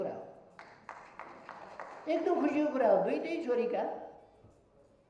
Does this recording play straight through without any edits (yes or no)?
yes